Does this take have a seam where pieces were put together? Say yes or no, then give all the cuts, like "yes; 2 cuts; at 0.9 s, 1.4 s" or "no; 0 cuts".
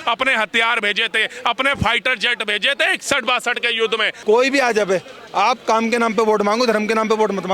yes; 1 cut; at 4.1 s